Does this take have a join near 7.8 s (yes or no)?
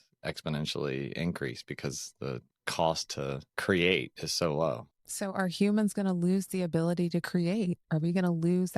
no